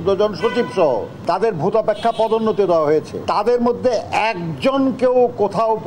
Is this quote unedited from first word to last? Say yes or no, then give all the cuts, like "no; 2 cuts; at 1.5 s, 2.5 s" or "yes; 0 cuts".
no; 2 cuts; at 1.1 s, 3.1 s